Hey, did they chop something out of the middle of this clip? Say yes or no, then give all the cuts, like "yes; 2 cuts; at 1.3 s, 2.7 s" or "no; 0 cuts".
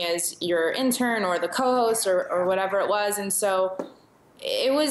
no; 0 cuts